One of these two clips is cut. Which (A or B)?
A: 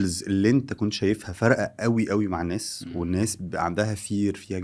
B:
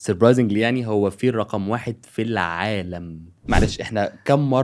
B